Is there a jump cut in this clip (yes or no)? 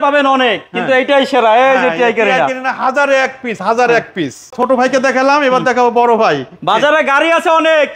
no